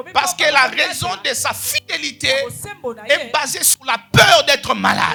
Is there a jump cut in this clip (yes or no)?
no